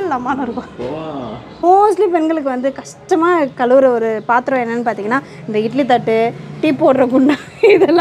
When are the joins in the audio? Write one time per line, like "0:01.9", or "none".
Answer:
0:01.6